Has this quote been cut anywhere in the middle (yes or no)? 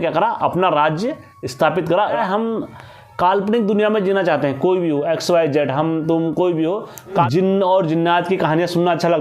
yes